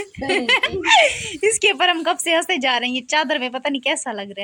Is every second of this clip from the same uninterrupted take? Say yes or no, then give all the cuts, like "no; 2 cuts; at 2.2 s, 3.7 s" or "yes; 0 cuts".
yes; 0 cuts